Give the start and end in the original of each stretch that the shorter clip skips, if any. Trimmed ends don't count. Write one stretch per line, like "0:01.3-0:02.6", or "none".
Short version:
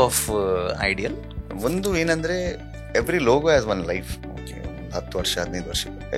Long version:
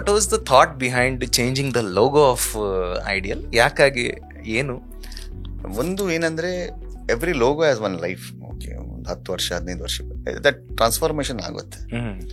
0:03.4-0:05.3